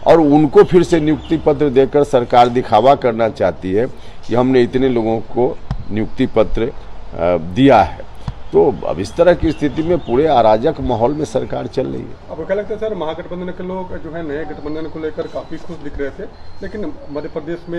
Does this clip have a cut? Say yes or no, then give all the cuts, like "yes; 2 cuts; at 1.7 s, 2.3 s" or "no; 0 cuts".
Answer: no; 0 cuts